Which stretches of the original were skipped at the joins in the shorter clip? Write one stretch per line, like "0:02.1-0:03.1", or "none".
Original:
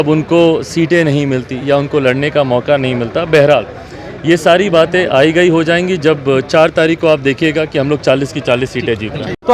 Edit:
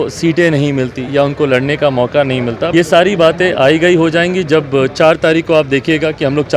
0:03.2-0:04.2